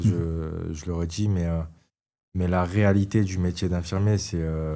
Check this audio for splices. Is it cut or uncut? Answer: uncut